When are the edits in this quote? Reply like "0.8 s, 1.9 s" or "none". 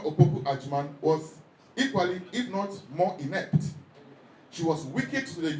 none